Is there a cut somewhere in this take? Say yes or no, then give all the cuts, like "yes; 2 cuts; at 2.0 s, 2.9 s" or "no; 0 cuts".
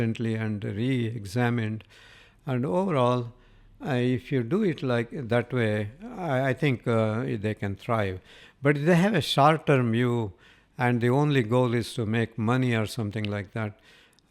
no; 0 cuts